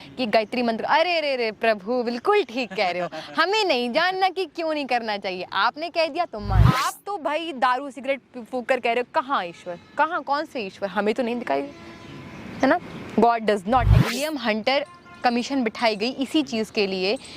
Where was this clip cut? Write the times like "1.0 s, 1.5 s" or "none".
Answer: 6.8 s, 14.2 s

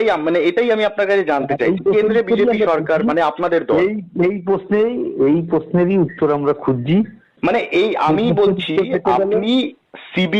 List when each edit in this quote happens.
7.2 s

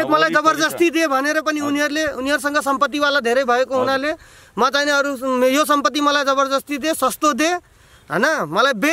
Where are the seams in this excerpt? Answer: none

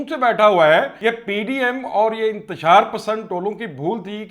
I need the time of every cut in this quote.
0.9 s

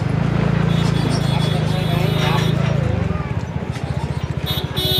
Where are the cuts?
none

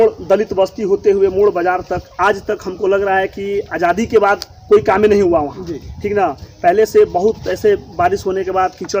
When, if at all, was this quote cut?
none

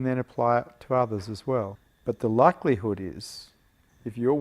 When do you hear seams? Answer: 1.8 s

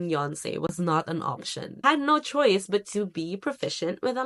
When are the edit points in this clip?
1.8 s

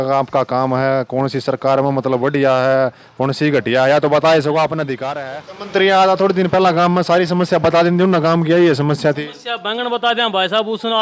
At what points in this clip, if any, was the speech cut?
5.1 s

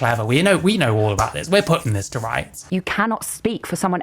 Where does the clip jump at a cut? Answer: 2.6 s

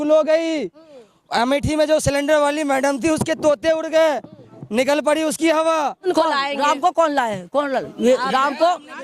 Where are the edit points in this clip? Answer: 6.0 s

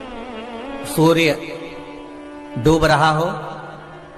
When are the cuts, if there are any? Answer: none

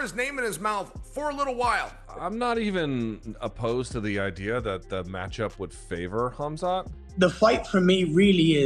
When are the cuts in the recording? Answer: 2.0 s, 7.0 s

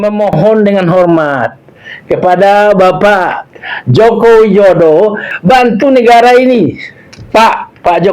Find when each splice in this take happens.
5.3 s

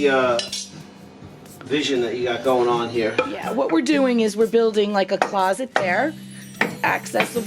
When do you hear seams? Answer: 3.4 s

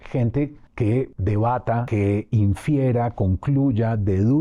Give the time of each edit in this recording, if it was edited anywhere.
1.0 s, 1.9 s

